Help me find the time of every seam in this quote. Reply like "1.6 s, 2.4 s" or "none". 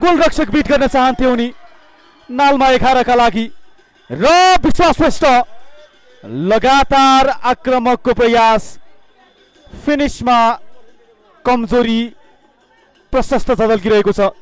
none